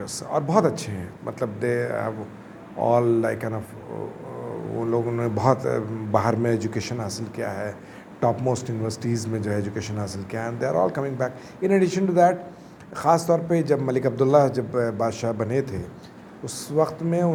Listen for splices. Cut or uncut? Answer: uncut